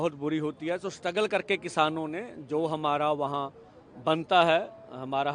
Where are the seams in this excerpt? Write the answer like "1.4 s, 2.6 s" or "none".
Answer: none